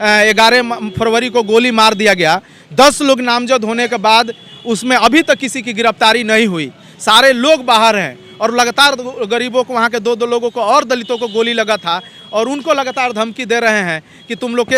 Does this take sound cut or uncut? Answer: uncut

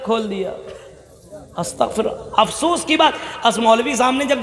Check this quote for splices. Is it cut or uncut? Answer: uncut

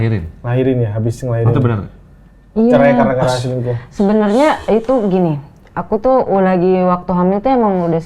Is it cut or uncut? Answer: uncut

